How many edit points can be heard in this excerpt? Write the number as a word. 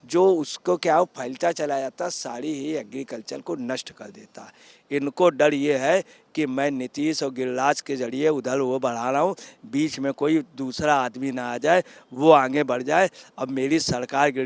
one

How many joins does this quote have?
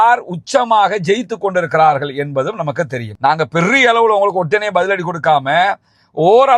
one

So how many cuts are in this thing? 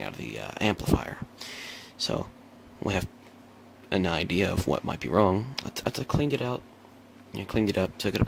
zero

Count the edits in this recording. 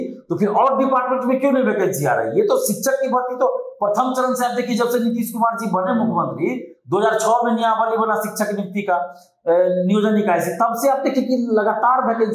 zero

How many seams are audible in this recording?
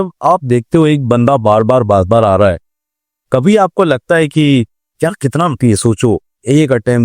one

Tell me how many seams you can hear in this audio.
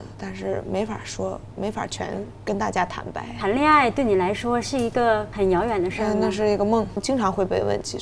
three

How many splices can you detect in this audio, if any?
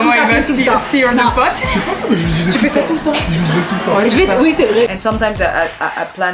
one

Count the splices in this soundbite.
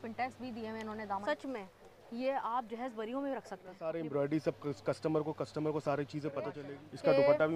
three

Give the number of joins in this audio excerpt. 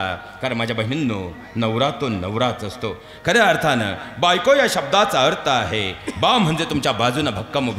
zero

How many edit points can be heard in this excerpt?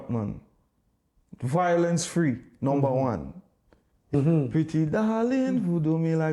one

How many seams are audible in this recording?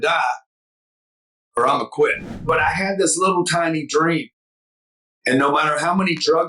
one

